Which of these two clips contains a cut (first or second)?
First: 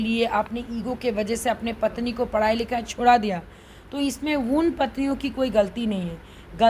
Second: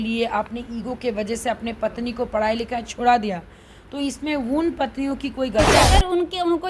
second